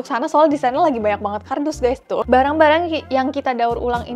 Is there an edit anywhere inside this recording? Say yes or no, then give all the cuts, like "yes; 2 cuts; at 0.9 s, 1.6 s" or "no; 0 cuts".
yes; 1 cut; at 2.2 s